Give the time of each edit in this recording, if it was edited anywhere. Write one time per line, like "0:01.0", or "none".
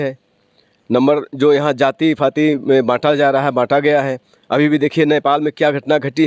none